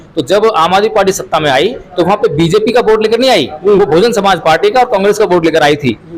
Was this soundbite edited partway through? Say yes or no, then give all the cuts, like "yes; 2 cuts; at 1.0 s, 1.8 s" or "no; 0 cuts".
no; 0 cuts